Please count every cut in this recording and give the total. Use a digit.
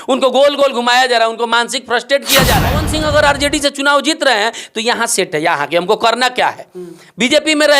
1